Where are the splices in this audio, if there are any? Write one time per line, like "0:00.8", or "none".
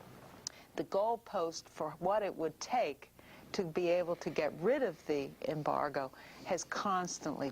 0:02.5